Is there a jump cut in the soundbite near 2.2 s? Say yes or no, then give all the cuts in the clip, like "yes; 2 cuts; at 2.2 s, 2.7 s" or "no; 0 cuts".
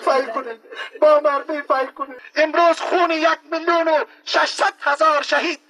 yes; 1 cut; at 2.2 s